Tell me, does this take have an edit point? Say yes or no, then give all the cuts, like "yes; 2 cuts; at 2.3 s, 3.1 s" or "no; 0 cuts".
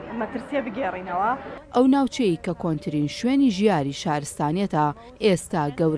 yes; 1 cut; at 1.5 s